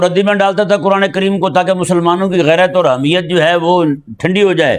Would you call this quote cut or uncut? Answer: uncut